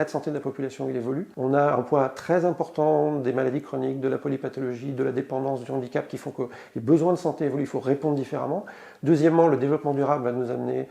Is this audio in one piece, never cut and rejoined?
yes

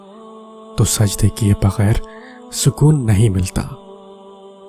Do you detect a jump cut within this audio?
yes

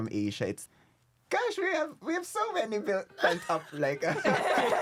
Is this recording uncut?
yes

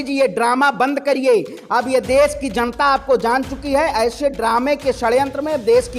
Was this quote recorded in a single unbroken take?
yes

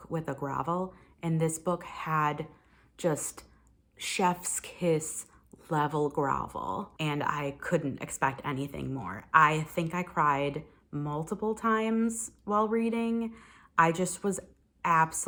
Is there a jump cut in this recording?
no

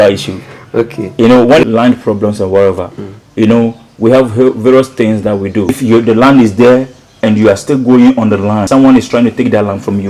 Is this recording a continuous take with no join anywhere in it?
no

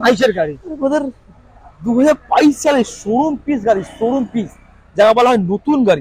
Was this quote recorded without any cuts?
yes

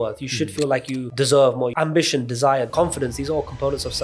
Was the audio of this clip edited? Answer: yes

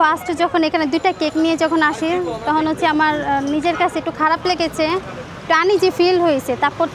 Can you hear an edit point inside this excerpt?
no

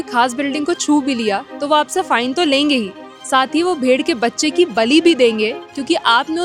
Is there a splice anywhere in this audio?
no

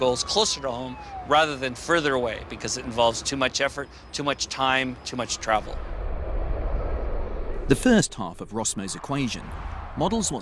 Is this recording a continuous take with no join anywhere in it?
yes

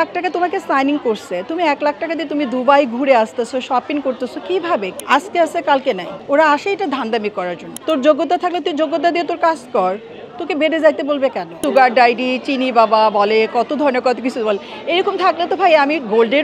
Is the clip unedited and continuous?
no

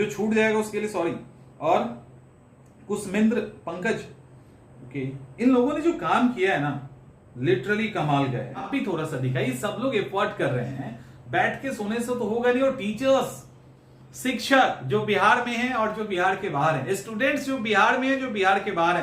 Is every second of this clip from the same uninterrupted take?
no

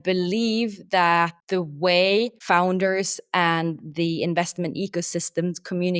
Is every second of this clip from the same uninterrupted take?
no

